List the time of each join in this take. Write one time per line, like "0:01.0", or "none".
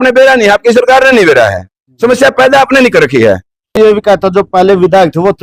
0:03.8